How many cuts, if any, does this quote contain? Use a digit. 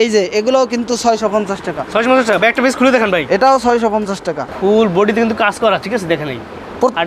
1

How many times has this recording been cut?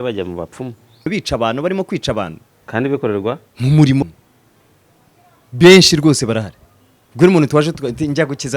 2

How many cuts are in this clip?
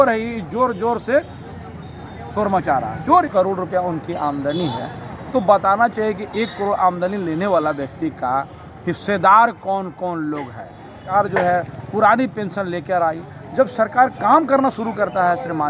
2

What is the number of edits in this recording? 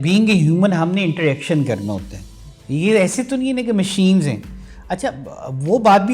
0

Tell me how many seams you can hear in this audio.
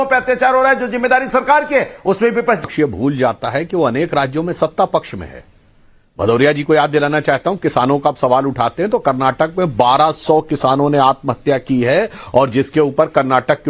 1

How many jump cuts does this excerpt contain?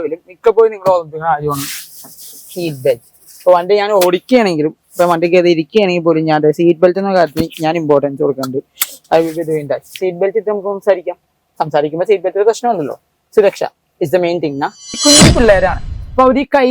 1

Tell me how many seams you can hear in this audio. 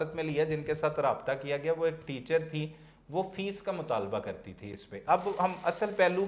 0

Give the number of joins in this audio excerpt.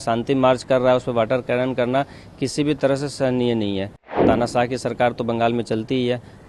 1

